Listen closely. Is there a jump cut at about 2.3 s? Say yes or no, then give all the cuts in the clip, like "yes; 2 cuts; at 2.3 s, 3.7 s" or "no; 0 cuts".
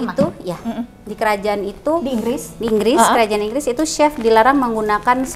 no; 0 cuts